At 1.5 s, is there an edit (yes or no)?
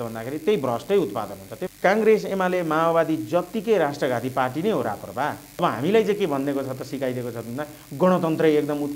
yes